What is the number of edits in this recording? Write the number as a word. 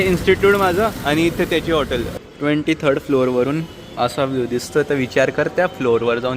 one